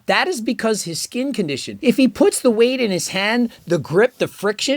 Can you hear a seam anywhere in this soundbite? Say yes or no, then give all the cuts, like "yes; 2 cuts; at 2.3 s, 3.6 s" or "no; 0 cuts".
yes; 1 cut; at 1.7 s